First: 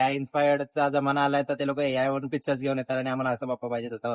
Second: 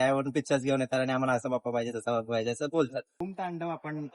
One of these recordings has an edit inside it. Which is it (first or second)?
second